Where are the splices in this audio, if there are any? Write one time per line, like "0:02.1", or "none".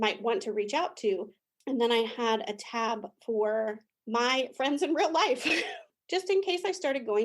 0:01.4
0:05.8